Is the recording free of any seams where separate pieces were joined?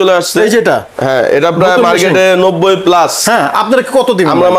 yes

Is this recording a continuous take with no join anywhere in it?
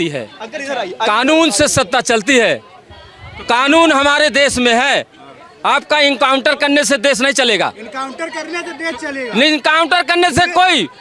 yes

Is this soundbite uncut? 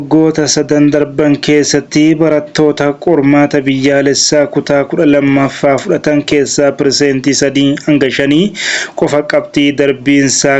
yes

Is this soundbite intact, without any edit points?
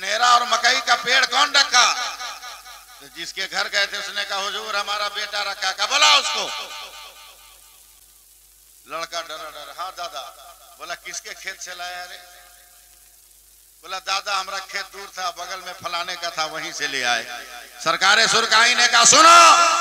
yes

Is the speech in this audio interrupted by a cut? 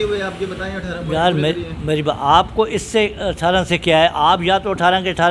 no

